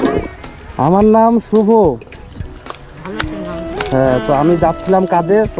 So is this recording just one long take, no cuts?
yes; 0 cuts

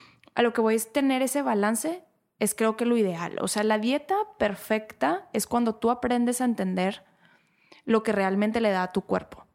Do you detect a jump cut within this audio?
no; 0 cuts

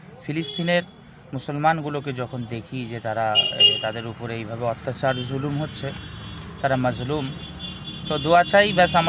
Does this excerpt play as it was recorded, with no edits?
yes; 0 cuts

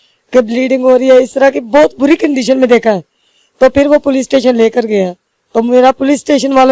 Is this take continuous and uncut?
yes; 0 cuts

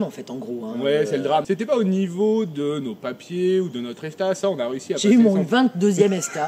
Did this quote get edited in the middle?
no; 0 cuts

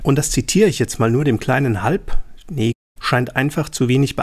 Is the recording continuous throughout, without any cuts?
yes; 0 cuts

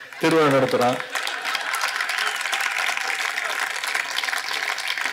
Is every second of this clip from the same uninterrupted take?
yes; 0 cuts

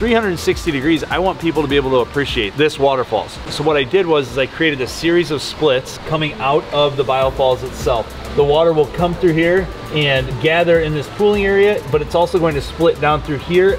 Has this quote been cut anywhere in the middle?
yes; 1 cut; at 3.5 s

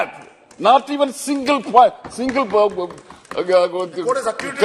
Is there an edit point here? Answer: no; 0 cuts

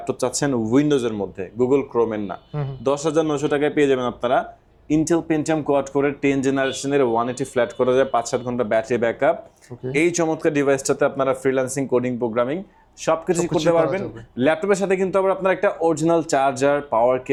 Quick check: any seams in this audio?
no; 0 cuts

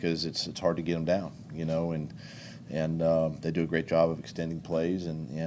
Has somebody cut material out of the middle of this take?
no; 0 cuts

